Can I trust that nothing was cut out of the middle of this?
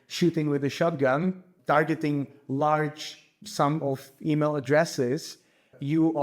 no; 1 cut; at 1.5 s

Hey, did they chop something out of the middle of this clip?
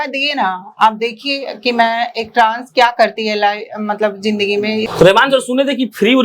yes; 1 cut; at 4.9 s

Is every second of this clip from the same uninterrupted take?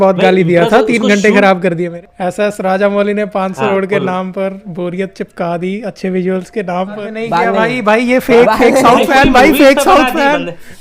no; 3 cuts; at 1.9 s, 3.7 s, 7.1 s

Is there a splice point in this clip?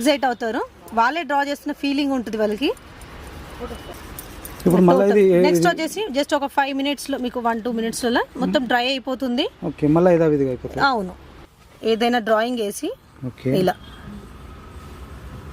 yes; 2 cuts; at 3.9 s, 11.4 s

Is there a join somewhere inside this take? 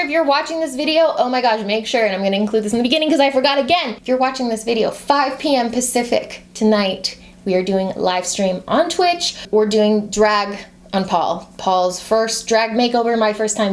no; 0 cuts

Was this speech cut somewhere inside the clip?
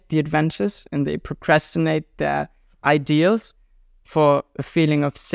no; 0 cuts

